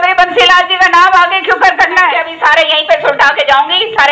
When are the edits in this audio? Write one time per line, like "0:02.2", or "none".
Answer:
0:02.3